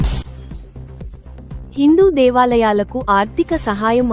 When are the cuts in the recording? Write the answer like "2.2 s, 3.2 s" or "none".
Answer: 1.7 s